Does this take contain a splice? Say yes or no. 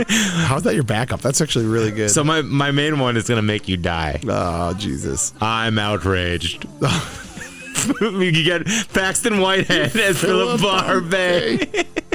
no